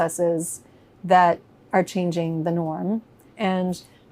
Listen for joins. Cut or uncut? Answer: cut